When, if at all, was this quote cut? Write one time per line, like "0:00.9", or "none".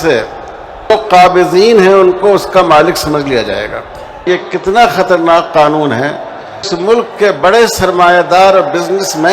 0:00.9
0:04.2
0:06.7